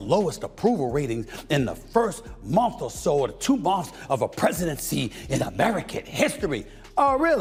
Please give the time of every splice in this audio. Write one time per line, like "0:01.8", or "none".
none